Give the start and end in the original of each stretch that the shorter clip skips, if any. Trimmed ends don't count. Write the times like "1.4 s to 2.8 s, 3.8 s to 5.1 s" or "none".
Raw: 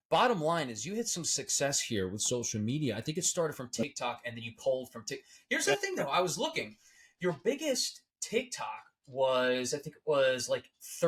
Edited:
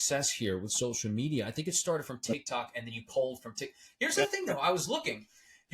none

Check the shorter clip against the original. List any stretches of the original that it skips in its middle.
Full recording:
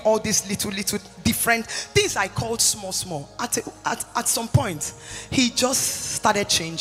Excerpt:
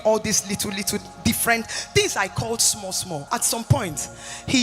3.2 s to 4.1 s

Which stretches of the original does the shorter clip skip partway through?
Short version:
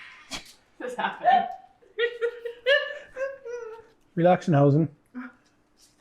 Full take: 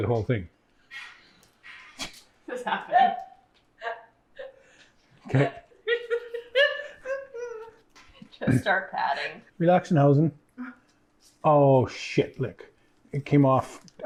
3.5 s to 5.7 s, 7.8 s to 9.4 s

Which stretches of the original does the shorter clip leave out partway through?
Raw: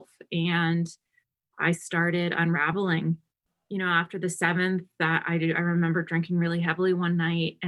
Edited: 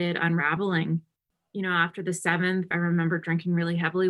4.9 s to 5.6 s

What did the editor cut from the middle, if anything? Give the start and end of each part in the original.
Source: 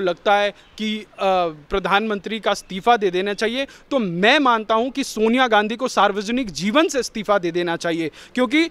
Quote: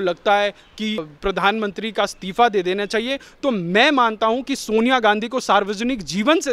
1.1 s to 1.6 s

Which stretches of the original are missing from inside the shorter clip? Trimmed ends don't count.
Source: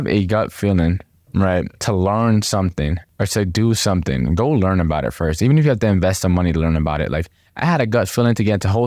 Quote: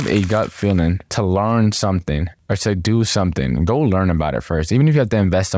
1.1 s to 1.8 s

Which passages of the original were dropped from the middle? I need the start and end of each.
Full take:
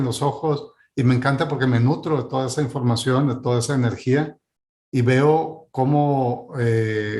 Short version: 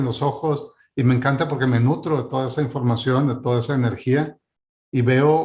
none

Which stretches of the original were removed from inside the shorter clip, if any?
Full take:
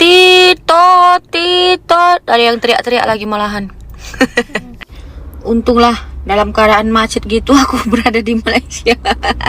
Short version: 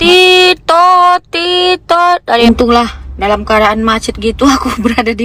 2.4 s to 5.5 s

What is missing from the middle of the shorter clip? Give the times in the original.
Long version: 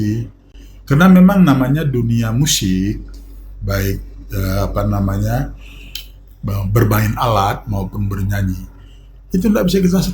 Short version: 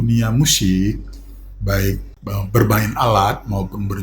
4.1 s to 6.3 s

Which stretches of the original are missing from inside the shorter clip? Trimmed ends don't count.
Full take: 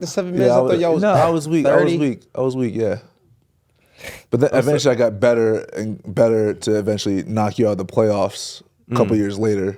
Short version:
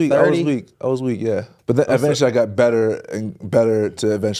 3.1 s to 4.2 s

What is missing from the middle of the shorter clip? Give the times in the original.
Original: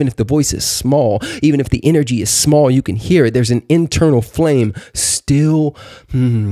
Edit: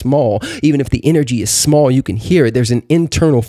none

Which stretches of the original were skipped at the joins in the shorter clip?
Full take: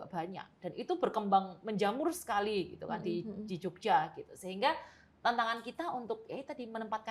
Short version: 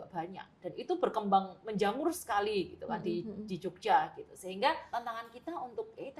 4.8 s to 5.2 s

